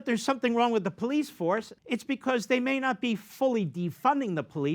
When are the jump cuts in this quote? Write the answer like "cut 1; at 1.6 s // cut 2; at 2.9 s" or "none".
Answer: cut 1; at 1.7 s